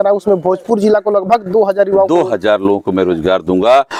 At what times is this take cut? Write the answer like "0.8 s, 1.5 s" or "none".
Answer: none